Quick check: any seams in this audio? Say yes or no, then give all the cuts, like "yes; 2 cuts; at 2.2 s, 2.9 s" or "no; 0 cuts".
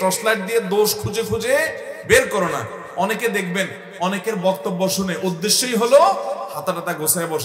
no; 0 cuts